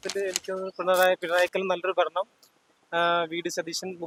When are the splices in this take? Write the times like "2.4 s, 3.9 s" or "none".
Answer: none